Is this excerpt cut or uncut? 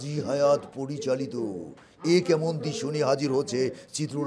uncut